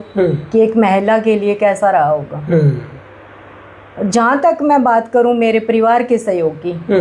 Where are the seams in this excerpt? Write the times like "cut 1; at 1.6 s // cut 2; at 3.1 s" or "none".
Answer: none